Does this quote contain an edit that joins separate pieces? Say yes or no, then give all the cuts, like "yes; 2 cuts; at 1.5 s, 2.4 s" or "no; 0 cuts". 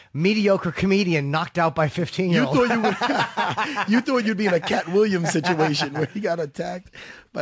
no; 0 cuts